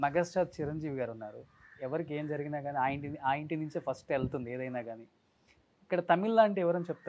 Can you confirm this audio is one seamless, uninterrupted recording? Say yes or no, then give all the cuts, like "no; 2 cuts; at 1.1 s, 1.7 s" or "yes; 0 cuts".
yes; 0 cuts